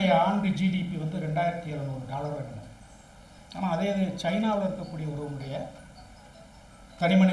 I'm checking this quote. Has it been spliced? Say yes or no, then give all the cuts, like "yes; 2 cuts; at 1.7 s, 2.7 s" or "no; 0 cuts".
no; 0 cuts